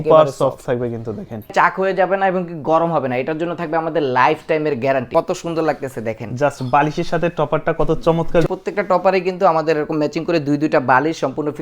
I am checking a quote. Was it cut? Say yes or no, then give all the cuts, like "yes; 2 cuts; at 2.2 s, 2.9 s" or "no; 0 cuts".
yes; 3 cuts; at 1.5 s, 5.1 s, 8.4 s